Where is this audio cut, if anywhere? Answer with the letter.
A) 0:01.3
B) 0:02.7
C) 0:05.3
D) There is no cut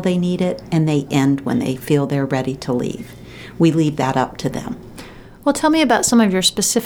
D